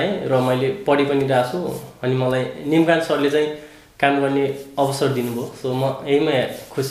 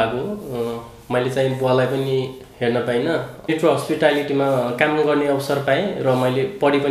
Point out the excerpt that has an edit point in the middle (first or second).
second